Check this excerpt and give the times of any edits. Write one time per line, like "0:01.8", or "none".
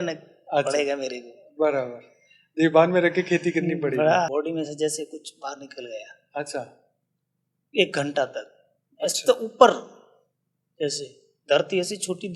0:04.3